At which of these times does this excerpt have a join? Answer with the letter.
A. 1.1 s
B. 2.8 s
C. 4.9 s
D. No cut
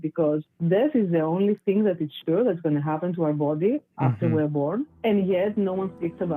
C